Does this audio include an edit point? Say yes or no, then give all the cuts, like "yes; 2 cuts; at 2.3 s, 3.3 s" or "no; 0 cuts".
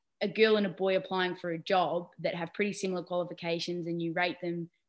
no; 0 cuts